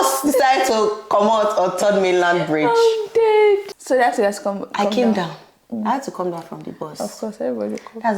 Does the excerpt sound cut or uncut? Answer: uncut